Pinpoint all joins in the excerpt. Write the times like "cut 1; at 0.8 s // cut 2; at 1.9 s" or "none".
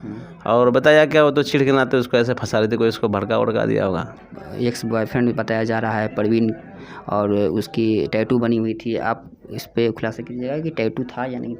cut 1; at 4.2 s